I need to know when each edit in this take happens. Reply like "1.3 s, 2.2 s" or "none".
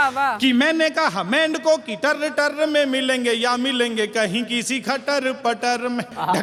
none